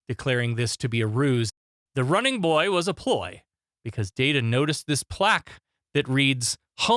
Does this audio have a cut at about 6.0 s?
no; 1 cut; at 1.5 s

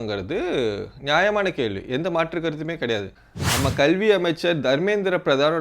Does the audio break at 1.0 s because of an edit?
no; 1 cut; at 3.1 s

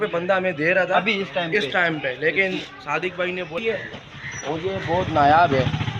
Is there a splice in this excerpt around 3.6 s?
yes; 1 cut; at 3.6 s

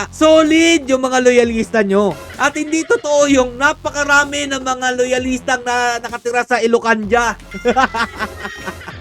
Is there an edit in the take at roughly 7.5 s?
yes; 1 cut; at 7.5 s

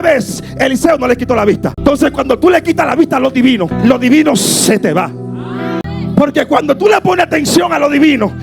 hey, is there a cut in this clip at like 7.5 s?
no; 3 cuts; at 1.8 s, 3.7 s, 5.8 s

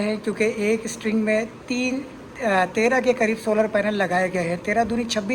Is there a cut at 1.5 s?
no; 0 cuts

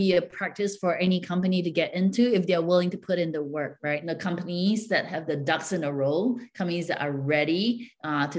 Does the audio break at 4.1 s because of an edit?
yes; 1 cut; at 4.1 s

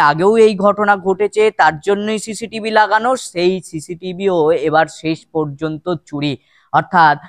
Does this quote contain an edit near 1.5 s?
no; 0 cuts

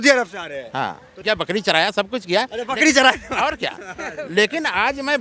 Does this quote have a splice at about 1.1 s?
yes; 1 cut; at 1.1 s

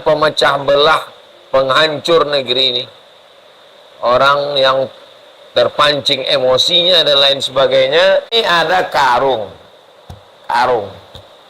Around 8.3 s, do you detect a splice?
yes; 1 cut; at 8.3 s

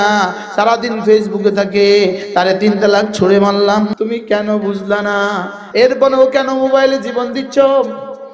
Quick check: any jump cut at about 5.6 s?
yes; 2 cuts; at 3.9 s, 5.6 s

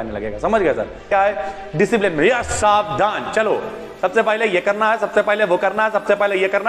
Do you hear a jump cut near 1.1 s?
yes; 1 cut; at 1.1 s

